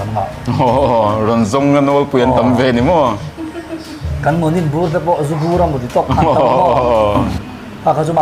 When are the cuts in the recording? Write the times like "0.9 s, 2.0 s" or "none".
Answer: 7.2 s